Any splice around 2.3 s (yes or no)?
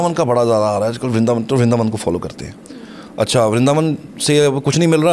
no